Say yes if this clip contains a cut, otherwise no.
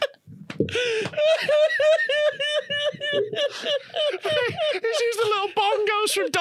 no